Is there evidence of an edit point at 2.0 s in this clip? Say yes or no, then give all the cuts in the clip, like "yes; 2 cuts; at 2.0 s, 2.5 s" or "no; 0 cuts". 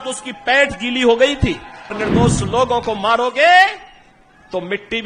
yes; 1 cut; at 2.0 s